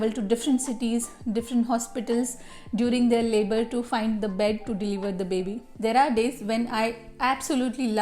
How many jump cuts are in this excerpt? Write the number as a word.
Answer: one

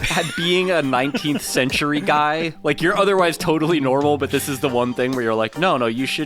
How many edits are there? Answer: zero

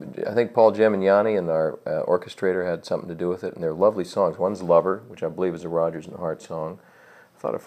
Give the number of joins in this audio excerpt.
one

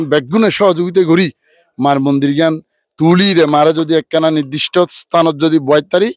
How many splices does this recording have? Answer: zero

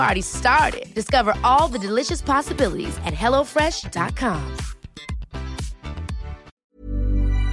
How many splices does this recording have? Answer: one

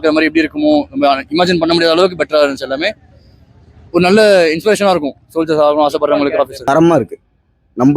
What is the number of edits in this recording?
one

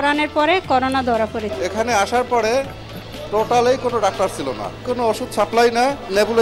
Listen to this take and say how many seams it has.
one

